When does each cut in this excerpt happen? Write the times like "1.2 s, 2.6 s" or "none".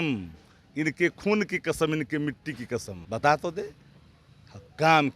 3.0 s